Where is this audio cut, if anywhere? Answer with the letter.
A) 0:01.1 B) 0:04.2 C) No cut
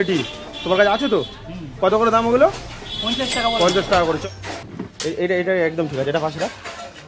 B